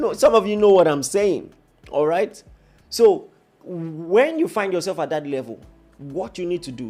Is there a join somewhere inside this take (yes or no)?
no